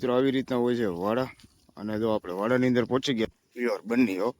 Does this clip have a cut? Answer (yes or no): yes